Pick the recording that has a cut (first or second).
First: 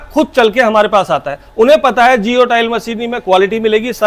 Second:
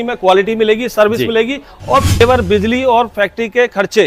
second